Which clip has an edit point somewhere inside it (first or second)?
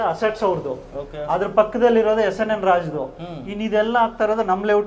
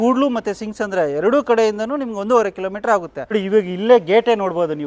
second